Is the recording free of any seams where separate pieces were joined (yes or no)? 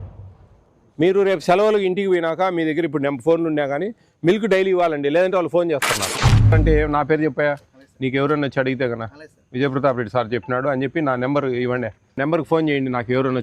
no